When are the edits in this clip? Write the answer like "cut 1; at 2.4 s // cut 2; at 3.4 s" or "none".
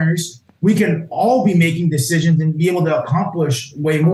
none